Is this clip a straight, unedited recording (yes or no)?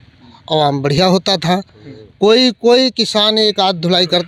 yes